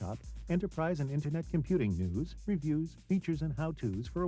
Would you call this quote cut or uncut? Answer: uncut